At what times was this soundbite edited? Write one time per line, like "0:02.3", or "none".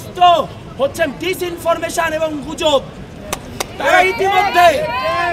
none